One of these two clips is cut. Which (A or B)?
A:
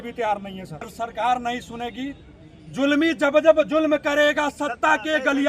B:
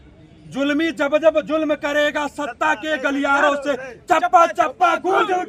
A